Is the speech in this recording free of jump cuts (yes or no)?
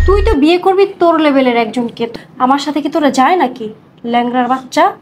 no